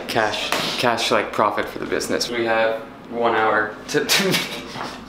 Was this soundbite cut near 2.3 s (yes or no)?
yes